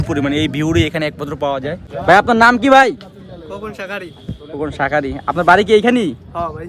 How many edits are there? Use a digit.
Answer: 1